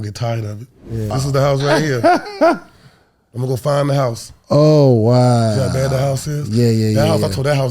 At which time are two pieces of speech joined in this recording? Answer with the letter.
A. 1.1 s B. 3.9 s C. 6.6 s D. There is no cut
A